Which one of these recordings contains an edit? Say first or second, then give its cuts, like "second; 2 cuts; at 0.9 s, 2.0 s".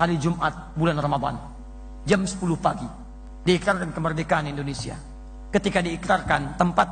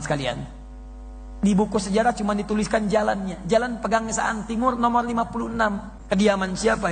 second; 1 cut; at 5.9 s